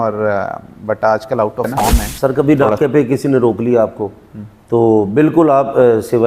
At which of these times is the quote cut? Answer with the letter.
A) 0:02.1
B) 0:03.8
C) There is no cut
A